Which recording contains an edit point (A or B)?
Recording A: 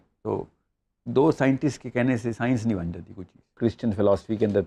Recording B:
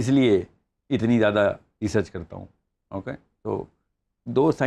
A